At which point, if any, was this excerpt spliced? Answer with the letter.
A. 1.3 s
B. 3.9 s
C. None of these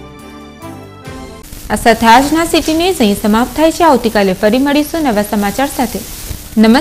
C